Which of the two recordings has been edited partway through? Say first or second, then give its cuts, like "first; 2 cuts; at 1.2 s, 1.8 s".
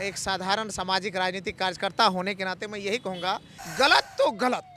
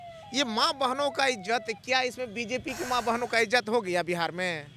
first; 1 cut; at 3.6 s